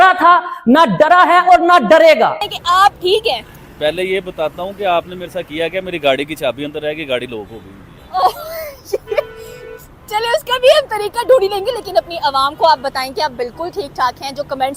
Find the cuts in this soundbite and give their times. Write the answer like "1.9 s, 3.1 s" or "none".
2.5 s